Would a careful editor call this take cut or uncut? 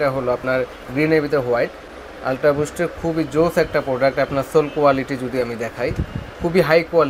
uncut